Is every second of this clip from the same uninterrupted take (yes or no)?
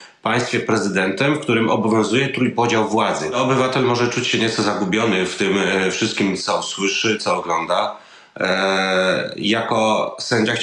no